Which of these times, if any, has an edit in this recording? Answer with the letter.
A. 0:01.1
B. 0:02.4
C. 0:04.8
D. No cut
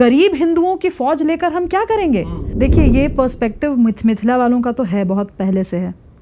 B